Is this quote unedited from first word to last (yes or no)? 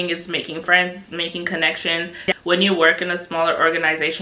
no